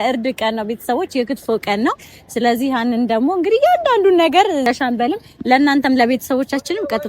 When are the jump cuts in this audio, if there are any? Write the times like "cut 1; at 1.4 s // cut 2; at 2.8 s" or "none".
cut 1; at 4.6 s